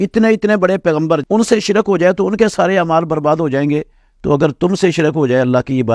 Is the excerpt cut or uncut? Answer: cut